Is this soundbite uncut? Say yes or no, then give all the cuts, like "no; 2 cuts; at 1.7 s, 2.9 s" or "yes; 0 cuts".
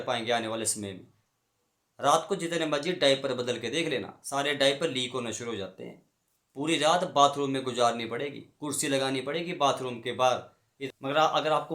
no; 1 cut; at 10.8 s